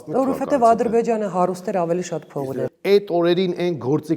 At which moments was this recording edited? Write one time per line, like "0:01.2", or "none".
0:02.5